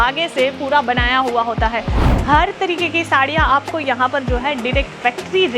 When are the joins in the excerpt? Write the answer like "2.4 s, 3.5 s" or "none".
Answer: 2.0 s